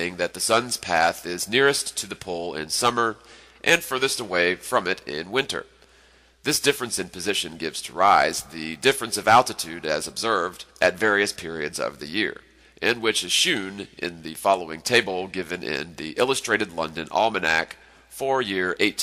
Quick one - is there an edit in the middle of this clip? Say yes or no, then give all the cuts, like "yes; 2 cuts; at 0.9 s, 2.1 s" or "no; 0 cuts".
no; 0 cuts